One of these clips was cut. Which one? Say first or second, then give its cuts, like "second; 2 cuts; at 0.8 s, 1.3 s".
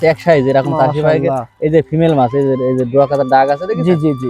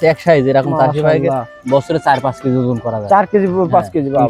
second; 1 cut; at 1.5 s